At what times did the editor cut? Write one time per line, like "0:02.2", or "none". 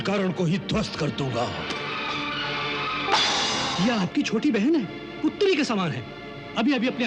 0:01.8
0:03.7